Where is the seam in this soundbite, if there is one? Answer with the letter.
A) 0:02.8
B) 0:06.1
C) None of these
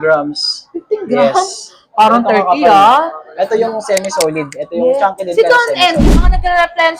B